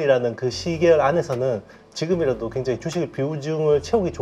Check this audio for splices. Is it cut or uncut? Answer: uncut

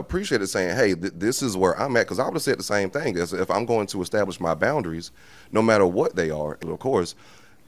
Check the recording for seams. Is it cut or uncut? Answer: cut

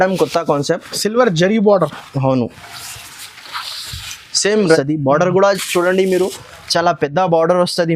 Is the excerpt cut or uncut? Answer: cut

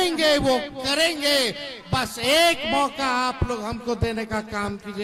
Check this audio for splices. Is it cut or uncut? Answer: uncut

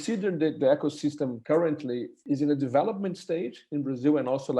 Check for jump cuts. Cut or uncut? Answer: cut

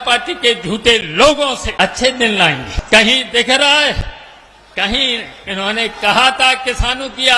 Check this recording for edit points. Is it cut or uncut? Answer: cut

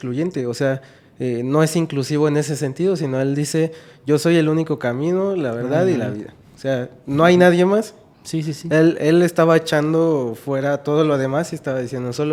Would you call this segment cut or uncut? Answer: uncut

